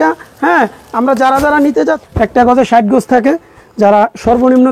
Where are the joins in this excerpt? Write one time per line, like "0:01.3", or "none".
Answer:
0:02.0

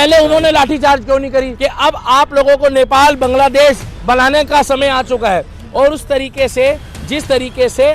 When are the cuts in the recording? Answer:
0:01.5
0:03.9

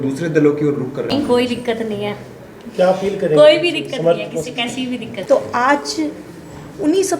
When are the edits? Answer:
0:01.1
0:05.1

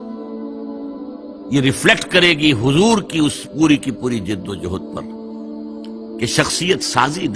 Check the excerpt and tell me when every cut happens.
none

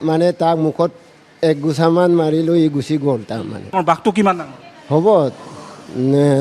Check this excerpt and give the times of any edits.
0:03.6

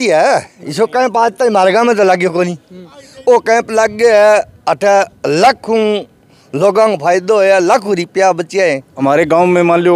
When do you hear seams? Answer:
0:08.9

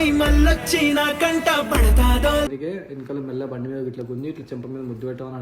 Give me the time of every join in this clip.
0:02.5

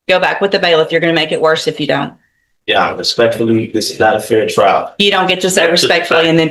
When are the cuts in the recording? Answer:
none

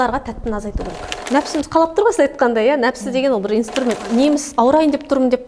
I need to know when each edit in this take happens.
0:01.2
0:04.0

